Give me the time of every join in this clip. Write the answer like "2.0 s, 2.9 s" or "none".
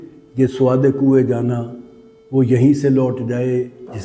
none